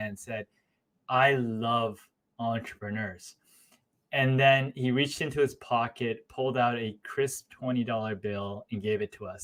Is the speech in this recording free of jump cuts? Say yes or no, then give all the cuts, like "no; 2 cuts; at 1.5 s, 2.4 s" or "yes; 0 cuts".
yes; 0 cuts